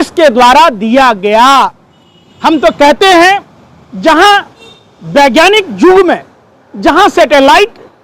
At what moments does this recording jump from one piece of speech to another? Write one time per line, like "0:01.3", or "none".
none

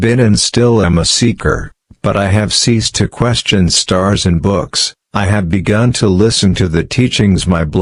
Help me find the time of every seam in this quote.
none

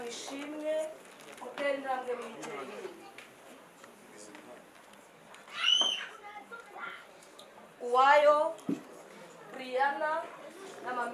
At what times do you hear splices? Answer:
none

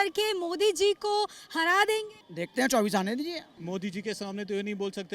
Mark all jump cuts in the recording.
0:03.5

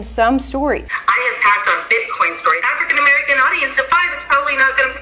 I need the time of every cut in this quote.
0:00.9
0:02.6

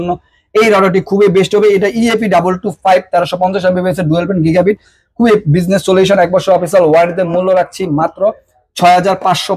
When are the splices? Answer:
none

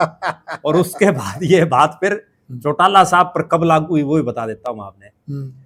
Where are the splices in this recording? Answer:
none

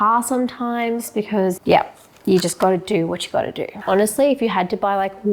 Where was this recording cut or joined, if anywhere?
0:03.8

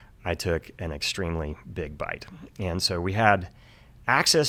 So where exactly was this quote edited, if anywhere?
none

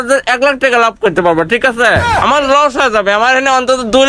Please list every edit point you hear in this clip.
0:02.0

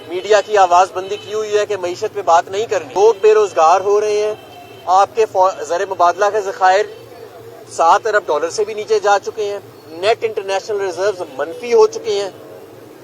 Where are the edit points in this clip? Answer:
0:02.9

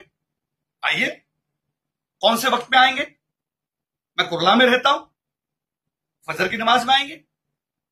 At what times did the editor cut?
none

